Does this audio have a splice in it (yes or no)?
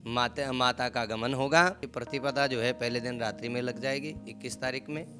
yes